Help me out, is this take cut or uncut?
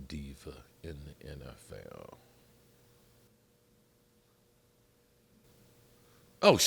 cut